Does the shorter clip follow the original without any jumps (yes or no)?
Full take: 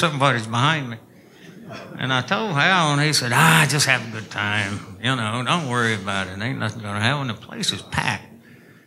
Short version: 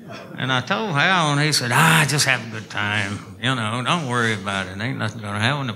yes